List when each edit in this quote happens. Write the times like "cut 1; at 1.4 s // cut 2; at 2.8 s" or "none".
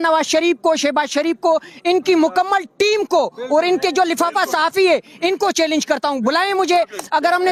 none